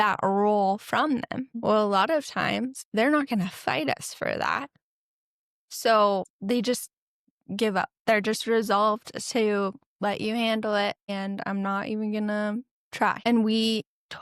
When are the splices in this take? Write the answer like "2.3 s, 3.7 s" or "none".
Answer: 1.5 s, 2.8 s, 6.3 s, 11.1 s, 13.2 s